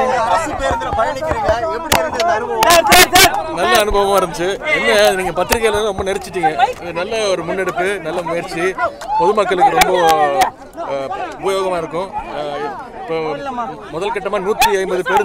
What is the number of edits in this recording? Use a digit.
0